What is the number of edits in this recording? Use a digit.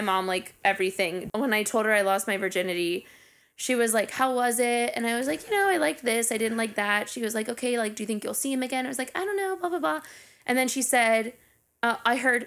1